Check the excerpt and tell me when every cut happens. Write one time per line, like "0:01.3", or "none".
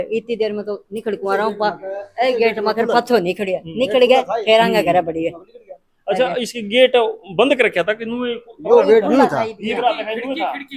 none